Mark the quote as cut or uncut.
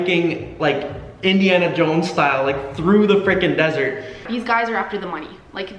cut